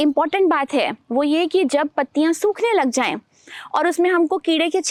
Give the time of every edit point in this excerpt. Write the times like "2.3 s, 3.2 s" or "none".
none